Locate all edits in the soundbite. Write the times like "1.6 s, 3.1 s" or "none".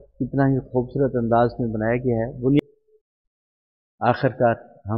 2.6 s

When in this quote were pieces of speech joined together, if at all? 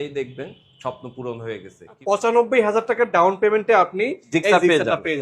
2.0 s

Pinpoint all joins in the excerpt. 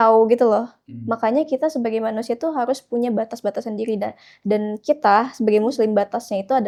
none

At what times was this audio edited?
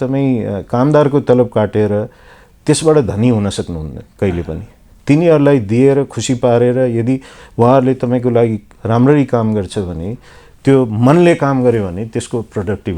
none

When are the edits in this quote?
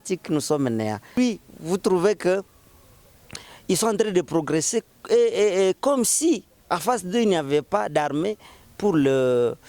1.1 s

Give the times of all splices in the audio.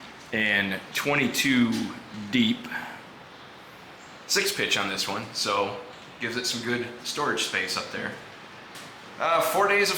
8.7 s

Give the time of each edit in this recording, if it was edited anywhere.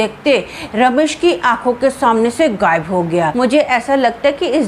3.3 s

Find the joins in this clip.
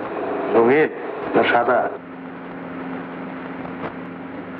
none

